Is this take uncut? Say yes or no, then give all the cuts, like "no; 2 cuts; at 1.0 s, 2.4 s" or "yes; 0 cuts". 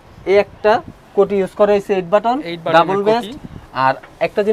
yes; 0 cuts